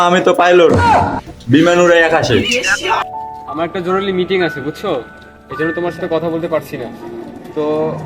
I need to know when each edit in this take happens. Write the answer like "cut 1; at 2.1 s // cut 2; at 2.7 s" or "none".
cut 1; at 3.0 s